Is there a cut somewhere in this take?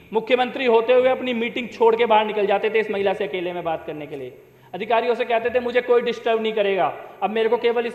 no; 0 cuts

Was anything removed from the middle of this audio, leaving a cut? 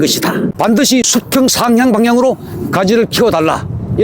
yes; 1 cut; at 1.0 s

